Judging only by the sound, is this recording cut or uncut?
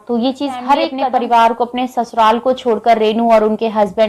cut